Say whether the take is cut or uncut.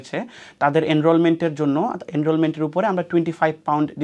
uncut